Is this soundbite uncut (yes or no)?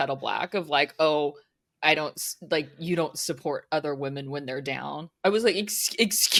yes